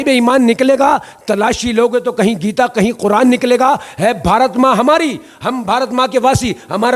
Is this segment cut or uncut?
uncut